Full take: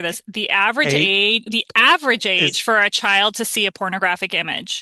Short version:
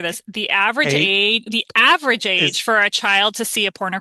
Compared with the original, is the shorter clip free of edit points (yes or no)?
yes